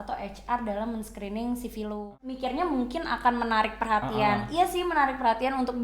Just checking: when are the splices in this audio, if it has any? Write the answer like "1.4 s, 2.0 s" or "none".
2.4 s